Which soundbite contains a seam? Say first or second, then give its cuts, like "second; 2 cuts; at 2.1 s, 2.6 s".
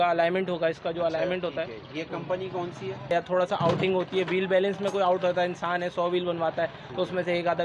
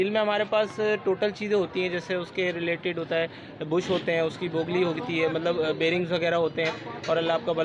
first; 1 cut; at 3.1 s